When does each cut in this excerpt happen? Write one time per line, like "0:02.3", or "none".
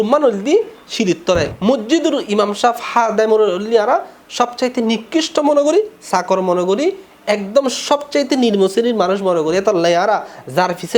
0:01.5